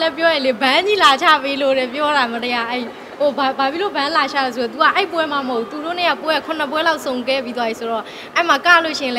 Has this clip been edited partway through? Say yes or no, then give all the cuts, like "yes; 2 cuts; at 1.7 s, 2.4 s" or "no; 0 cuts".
no; 0 cuts